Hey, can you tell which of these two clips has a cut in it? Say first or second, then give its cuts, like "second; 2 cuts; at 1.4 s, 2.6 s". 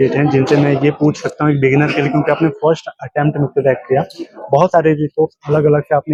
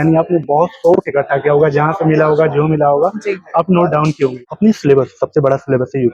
second; 1 cut; at 4.4 s